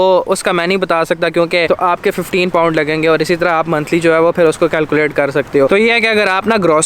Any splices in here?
yes; 2 cuts; at 1.7 s, 5.7 s

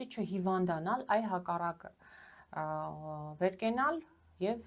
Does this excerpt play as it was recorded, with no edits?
yes; 0 cuts

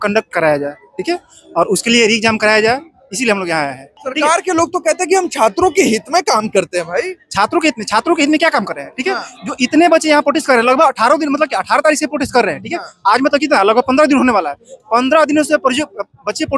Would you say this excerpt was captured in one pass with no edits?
yes; 0 cuts

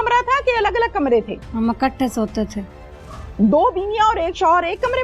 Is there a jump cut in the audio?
yes; 1 cut; at 1.4 s

